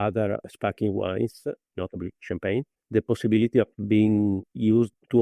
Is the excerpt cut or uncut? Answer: cut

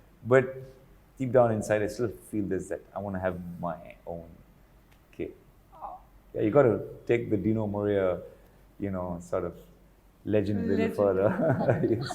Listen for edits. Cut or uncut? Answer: uncut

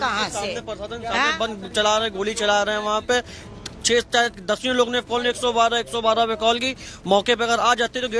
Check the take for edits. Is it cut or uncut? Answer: uncut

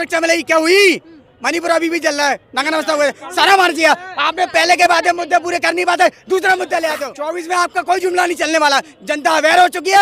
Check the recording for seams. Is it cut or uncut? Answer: cut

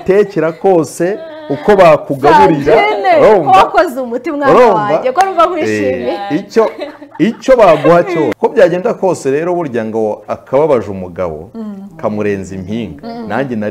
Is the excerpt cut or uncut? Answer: cut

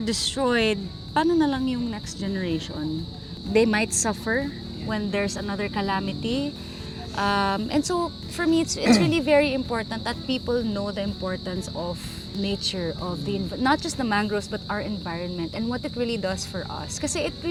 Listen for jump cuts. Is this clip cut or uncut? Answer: uncut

